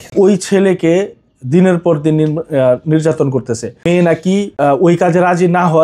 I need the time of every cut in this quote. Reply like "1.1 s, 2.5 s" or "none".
3.9 s, 4.5 s